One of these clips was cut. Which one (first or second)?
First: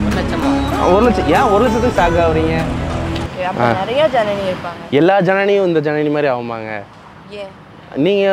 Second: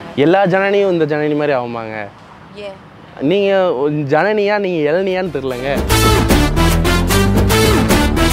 first